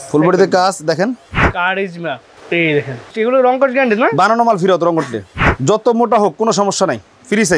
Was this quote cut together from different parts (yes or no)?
yes